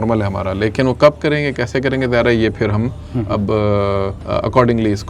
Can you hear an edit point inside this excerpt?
yes; 1 cut; at 4.2 s

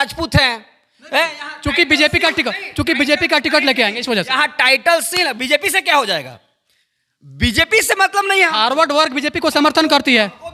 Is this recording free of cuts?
yes; 0 cuts

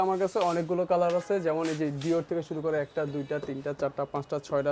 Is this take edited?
no; 0 cuts

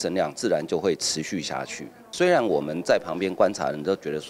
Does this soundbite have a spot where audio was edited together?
yes; 1 cut; at 2.1 s

